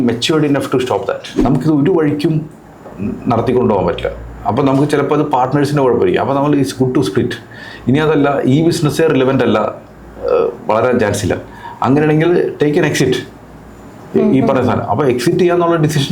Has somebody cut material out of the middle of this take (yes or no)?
yes